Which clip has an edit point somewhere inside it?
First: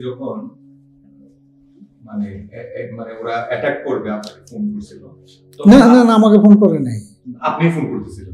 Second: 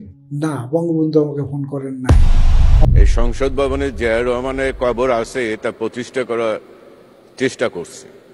second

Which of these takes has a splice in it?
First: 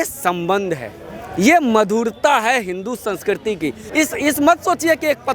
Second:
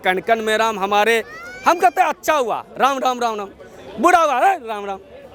first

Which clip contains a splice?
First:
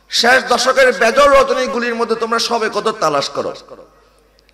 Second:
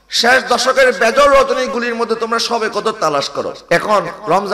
second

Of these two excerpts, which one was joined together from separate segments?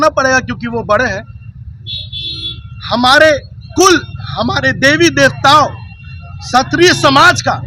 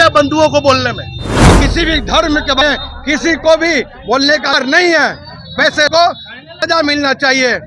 second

